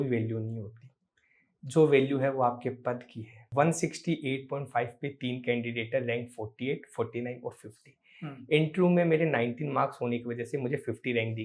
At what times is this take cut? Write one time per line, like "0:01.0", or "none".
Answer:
0:03.5